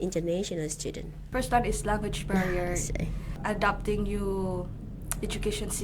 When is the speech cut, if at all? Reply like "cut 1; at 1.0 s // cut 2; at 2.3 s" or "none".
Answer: cut 1; at 1.1 s // cut 2; at 3.3 s